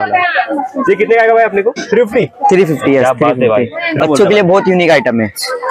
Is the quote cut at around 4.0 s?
yes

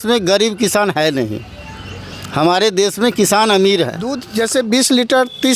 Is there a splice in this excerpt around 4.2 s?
yes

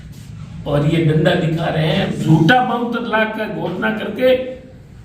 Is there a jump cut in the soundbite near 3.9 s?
no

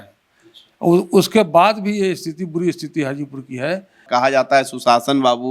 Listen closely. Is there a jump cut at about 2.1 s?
no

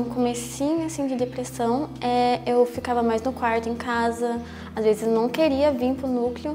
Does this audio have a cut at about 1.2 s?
no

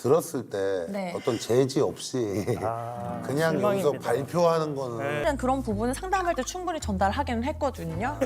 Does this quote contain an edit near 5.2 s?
yes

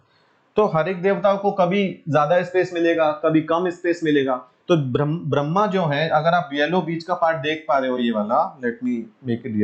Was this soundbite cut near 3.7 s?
no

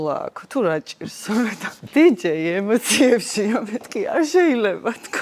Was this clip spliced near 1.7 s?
yes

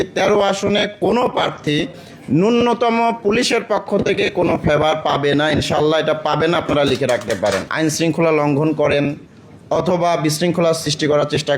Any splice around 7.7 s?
yes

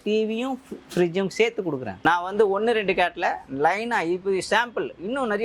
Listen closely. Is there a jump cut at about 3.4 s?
no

